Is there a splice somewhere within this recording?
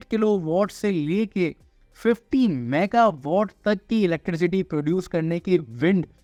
no; 0 cuts

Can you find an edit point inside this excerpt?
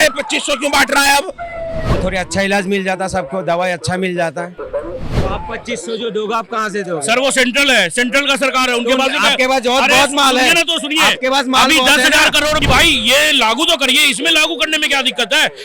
yes; 3 cuts; at 2.0 s, 5.1 s, 12.6 s

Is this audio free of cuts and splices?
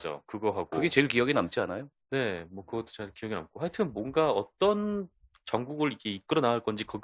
no; 1 cut; at 3.4 s

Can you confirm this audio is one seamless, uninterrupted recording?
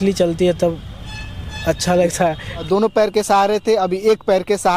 no; 1 cut; at 2.6 s

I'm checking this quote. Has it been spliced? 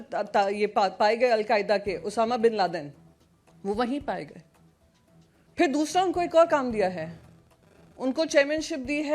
no; 0 cuts

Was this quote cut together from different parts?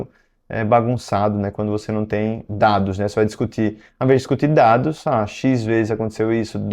no; 0 cuts

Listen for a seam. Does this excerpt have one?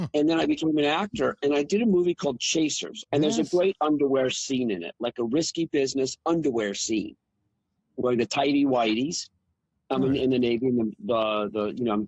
yes; 1 cut; at 2.9 s

